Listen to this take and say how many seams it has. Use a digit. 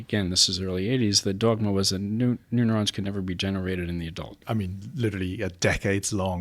1